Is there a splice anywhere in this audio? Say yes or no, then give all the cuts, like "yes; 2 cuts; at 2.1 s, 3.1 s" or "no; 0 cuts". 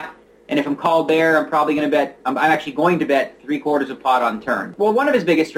yes; 1 cut; at 4.7 s